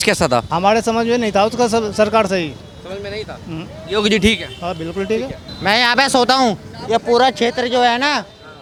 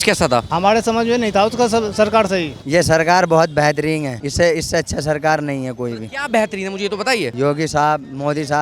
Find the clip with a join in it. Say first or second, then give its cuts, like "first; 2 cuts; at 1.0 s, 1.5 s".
second; 1 cut; at 2.6 s